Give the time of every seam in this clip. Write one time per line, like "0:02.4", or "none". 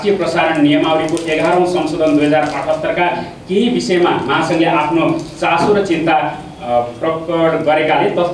none